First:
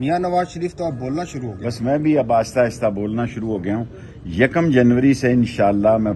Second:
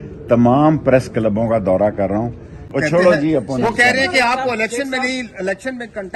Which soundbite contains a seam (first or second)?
second